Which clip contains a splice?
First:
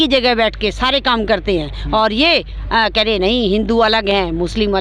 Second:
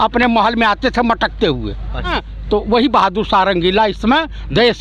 second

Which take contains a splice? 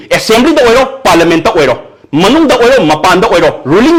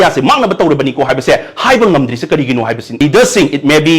second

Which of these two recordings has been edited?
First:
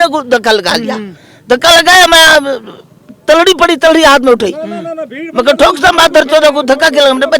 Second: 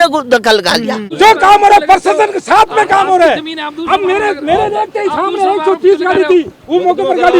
second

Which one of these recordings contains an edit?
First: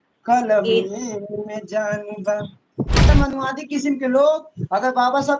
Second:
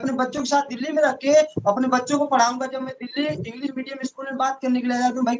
first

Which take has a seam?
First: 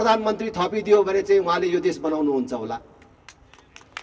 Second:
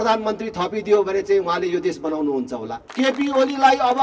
second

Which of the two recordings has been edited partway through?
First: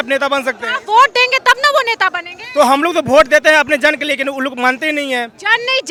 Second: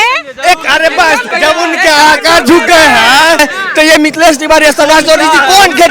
second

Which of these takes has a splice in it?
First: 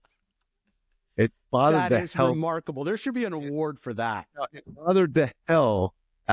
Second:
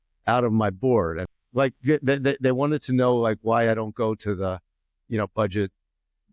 second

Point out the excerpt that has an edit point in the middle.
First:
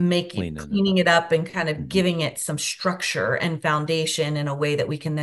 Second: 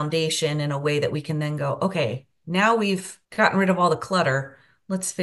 second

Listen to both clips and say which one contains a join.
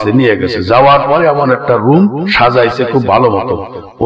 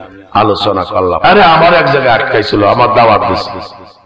second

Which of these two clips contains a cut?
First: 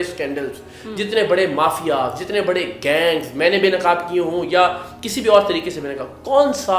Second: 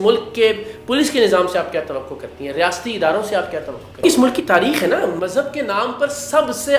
second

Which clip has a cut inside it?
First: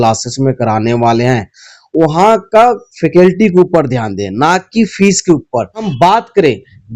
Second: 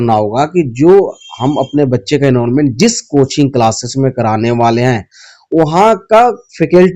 first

